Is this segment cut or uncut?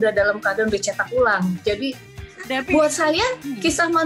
cut